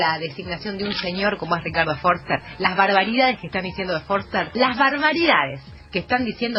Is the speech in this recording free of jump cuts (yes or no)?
yes